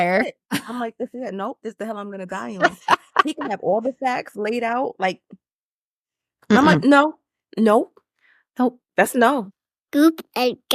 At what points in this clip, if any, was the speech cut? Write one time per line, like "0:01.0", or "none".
0:09.6